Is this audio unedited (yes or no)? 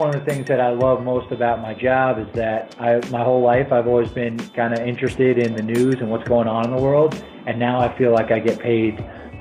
yes